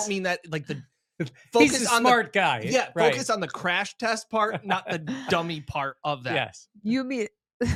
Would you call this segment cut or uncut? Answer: uncut